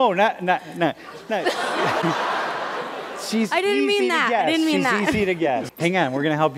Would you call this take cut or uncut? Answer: cut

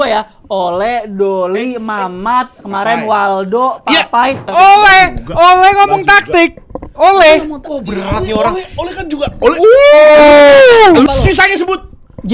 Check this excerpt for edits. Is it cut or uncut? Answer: cut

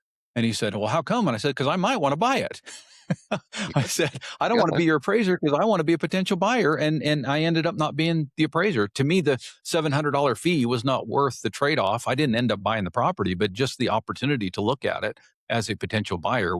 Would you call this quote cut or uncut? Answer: uncut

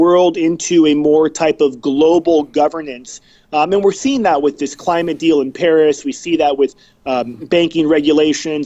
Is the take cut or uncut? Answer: uncut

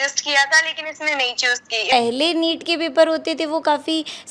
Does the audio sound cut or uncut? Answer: cut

